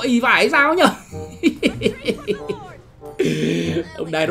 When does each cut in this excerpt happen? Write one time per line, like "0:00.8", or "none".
none